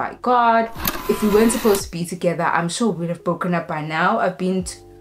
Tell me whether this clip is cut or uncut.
cut